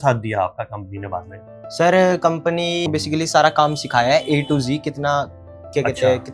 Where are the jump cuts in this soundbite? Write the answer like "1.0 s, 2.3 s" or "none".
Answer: 2.9 s